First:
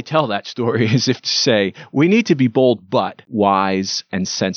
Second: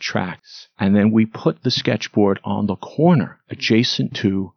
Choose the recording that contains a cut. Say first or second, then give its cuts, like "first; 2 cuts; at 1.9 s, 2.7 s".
first; 1 cut; at 3.3 s